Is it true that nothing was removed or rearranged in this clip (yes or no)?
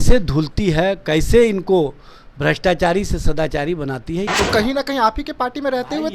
no